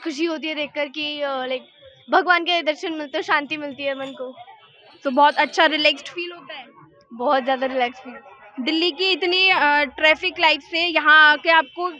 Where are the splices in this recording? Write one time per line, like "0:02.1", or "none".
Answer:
none